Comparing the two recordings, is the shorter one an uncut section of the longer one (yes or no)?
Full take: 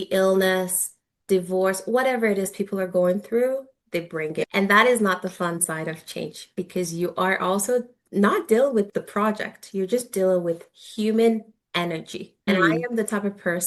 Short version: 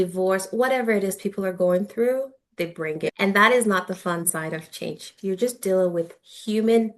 no